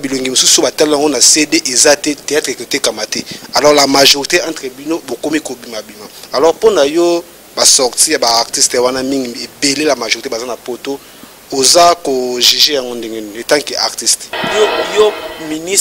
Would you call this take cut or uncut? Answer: cut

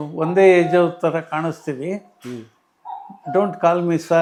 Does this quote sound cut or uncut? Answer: uncut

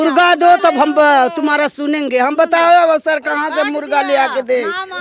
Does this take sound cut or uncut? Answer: uncut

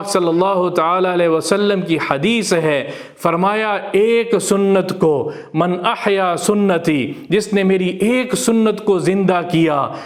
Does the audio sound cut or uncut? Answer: uncut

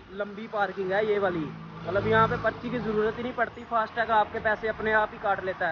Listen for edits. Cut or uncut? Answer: uncut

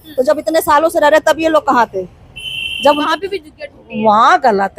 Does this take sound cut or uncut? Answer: cut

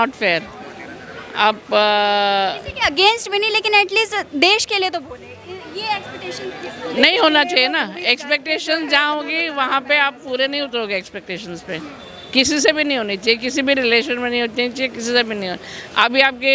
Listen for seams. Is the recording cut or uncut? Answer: uncut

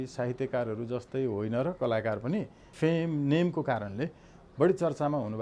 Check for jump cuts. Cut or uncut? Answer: cut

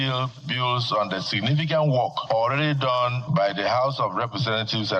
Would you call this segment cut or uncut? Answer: cut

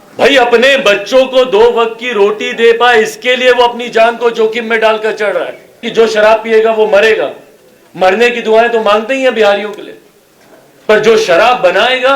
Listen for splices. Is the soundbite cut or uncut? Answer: cut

